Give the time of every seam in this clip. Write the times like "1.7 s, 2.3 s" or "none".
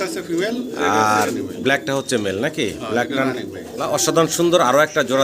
3.6 s